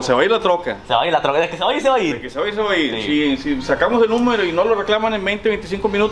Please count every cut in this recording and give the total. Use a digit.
0